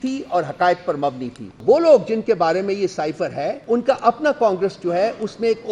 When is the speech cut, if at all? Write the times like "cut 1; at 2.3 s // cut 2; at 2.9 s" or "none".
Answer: cut 1; at 1.6 s // cut 2; at 3.6 s